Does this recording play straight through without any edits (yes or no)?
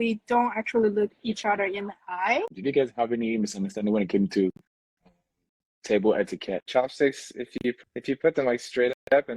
no